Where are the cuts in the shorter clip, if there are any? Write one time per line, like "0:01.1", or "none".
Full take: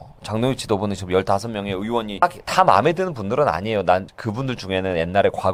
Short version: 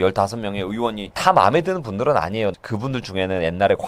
0:01.0
0:02.5